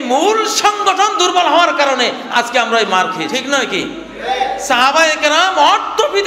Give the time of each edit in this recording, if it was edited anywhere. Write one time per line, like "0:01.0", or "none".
0:03.3